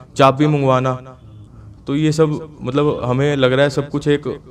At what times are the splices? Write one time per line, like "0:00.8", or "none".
0:01.3

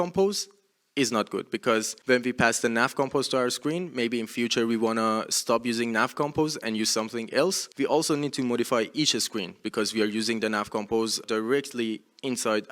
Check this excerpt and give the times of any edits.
0:01.9
0:07.6
0:11.2

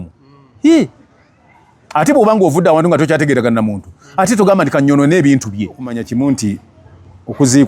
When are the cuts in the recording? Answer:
0:06.0

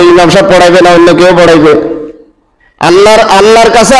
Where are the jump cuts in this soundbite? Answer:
none

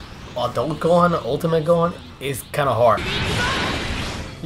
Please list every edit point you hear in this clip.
0:03.1

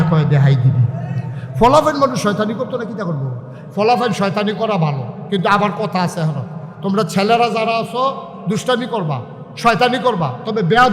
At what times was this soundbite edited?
none

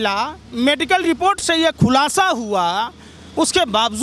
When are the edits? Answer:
none

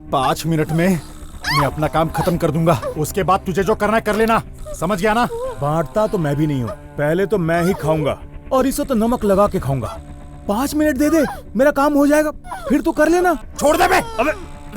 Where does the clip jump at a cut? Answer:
0:13.5

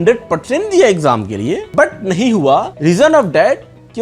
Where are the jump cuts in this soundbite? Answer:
0:01.7
0:02.7

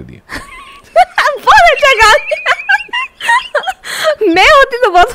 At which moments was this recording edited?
none

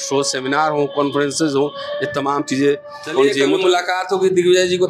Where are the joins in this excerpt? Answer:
0:03.4

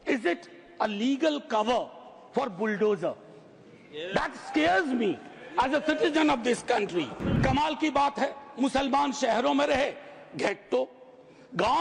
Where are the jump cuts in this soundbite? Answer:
0:07.2

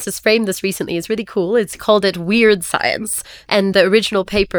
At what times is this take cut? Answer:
0:01.8
0:03.7

